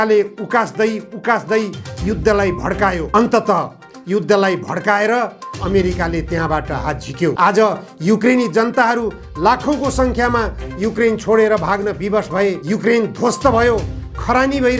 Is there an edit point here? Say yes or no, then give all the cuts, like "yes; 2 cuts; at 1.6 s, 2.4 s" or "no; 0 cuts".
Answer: yes; 3 cuts; at 3.1 s, 7.4 s, 12.6 s